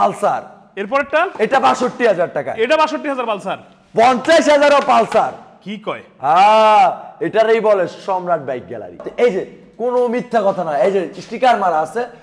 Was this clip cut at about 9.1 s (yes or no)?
yes